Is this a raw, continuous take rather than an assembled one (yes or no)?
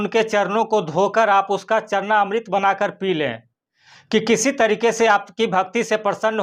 yes